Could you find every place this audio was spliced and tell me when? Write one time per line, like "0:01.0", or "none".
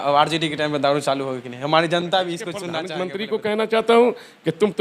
0:02.8